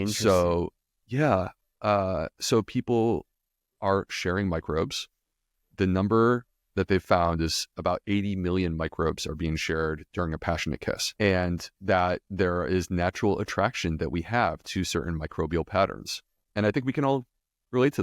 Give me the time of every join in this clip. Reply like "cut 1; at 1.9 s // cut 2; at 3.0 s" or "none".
cut 1; at 11.1 s

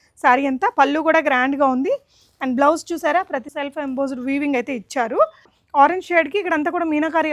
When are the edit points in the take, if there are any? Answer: cut 1; at 3.5 s // cut 2; at 5.6 s

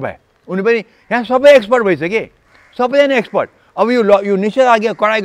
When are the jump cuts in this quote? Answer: none

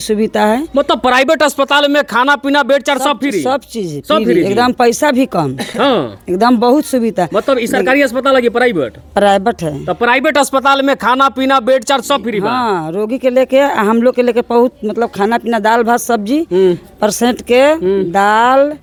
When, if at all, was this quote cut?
none

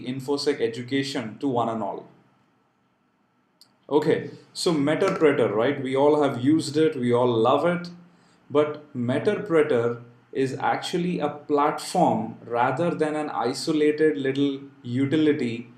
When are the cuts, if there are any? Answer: cut 1; at 2.4 s

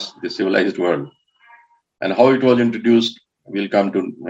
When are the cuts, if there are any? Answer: none

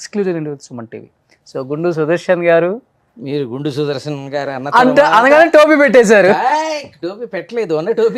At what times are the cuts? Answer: none

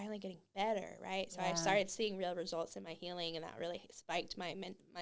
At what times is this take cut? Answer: none

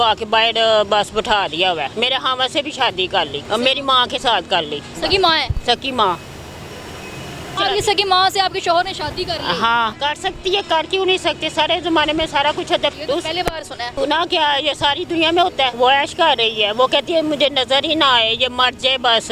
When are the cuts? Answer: cut 1; at 1.9 s // cut 2; at 3.4 s // cut 3; at 5.0 s // cut 4; at 7.6 s // cut 5; at 9.9 s // cut 6; at 12.9 s // cut 7; at 13.9 s // cut 8; at 15.7 s

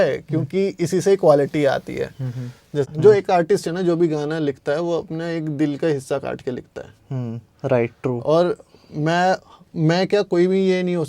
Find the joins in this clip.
cut 1; at 2.9 s

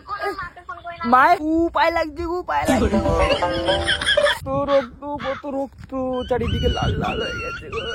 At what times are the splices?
cut 1; at 1.4 s // cut 2; at 4.4 s

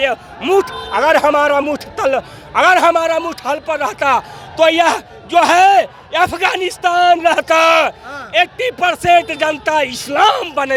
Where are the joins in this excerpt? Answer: none

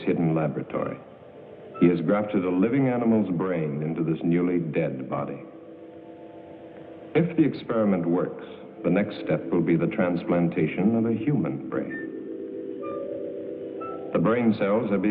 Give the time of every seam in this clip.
cut 1; at 1.4 s

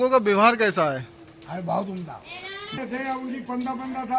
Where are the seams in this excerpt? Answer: cut 1; at 2.6 s

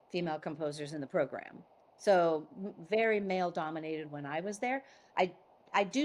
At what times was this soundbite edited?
none

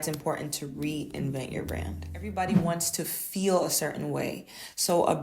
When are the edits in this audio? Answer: cut 1; at 2.6 s

